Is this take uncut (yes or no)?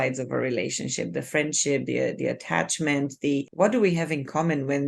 no